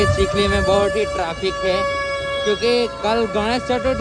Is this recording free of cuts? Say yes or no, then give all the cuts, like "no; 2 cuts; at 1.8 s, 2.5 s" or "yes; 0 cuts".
yes; 0 cuts